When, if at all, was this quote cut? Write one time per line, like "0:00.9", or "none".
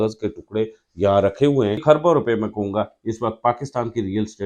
0:01.8